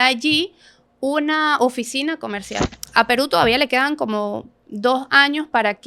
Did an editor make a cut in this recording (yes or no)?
yes